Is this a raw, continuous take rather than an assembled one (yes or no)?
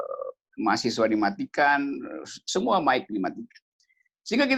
yes